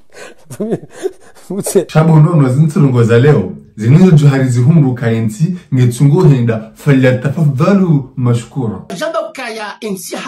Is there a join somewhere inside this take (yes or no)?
yes